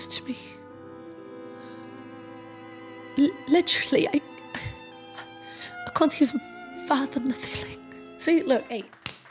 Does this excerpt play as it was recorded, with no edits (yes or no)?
yes